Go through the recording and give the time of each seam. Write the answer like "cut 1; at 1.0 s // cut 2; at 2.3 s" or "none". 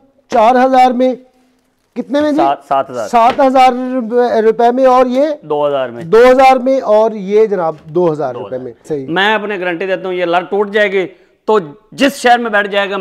cut 1; at 8.9 s